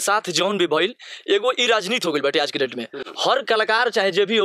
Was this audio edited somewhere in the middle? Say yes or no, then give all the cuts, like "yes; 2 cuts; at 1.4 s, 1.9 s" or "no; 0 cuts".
no; 0 cuts